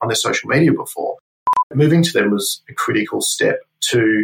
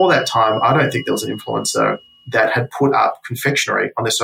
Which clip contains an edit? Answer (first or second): first